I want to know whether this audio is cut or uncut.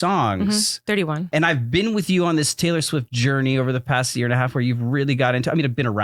cut